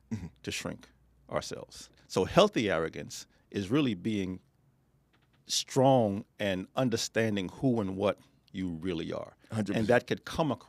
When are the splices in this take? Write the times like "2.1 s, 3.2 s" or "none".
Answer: 1.9 s

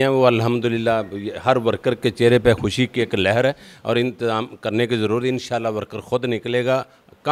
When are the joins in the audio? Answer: none

